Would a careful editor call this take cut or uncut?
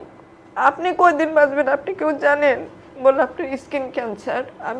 uncut